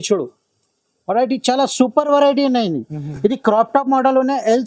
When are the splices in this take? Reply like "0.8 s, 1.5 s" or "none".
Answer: none